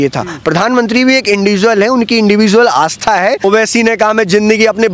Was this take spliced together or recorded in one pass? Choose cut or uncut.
cut